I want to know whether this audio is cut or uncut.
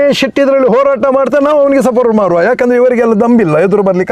uncut